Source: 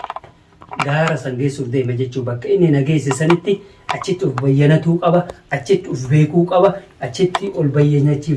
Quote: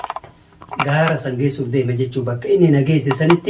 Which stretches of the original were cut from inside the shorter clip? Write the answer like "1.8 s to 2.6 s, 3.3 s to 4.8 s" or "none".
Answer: none